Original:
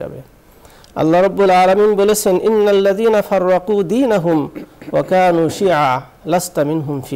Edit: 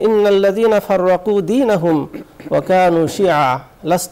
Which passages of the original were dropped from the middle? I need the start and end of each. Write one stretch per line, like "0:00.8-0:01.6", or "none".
none